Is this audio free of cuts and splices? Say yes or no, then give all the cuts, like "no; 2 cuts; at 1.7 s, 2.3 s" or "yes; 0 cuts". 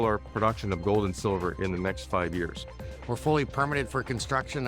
no; 1 cut; at 2.8 s